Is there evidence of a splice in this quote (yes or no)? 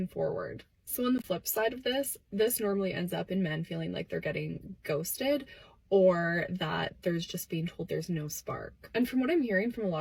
no